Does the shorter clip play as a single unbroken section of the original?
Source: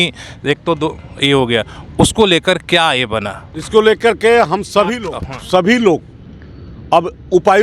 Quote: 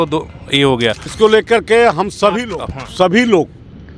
no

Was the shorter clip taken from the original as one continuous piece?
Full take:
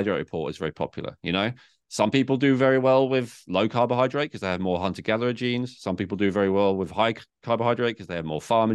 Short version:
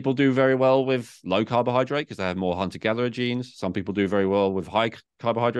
yes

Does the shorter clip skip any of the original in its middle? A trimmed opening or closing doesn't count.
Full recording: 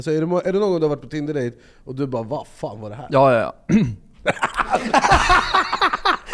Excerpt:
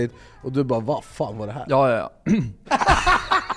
yes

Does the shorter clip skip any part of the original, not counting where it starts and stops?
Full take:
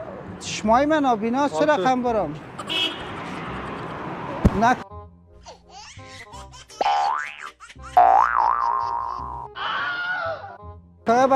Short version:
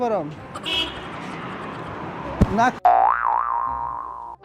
yes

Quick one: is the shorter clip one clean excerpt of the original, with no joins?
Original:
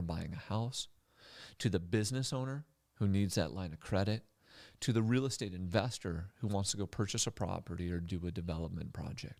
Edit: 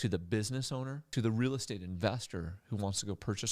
no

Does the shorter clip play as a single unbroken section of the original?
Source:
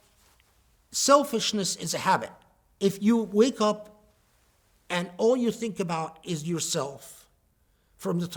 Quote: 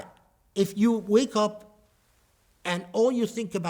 yes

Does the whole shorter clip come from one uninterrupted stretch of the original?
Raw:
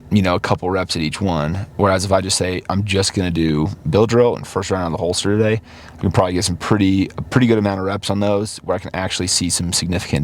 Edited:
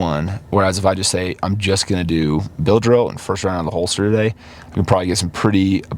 yes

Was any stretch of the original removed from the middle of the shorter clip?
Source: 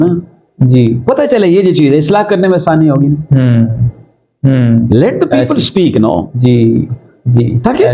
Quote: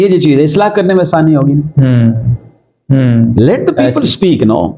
no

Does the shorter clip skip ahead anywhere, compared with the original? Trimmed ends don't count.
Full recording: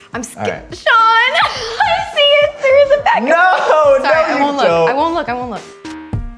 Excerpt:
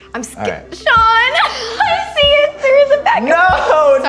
no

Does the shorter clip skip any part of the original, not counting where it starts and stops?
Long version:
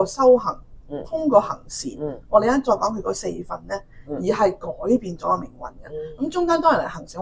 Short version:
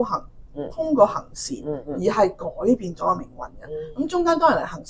yes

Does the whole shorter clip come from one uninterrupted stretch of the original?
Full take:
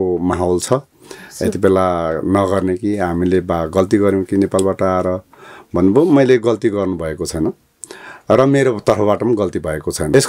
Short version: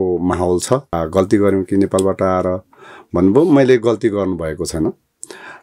no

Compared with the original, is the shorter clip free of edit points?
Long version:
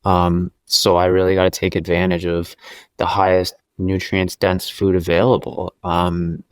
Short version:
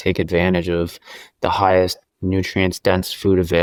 yes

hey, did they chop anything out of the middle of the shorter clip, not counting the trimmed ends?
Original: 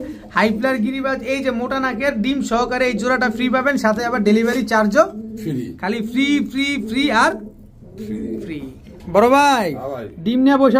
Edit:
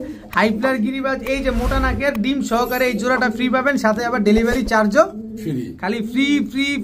no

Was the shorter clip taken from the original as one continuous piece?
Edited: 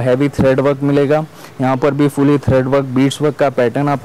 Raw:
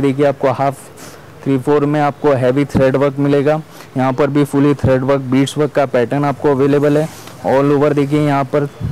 yes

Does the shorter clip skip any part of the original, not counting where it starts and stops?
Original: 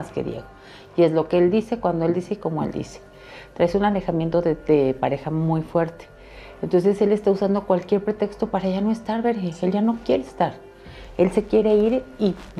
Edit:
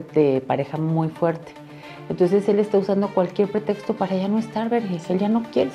no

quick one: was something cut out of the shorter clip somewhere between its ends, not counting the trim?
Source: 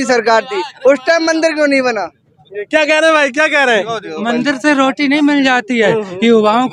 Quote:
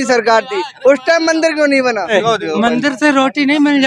yes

